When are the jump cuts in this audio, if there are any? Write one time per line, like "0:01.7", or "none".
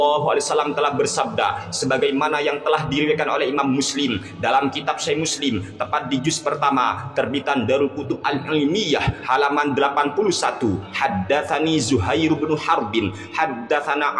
0:10.9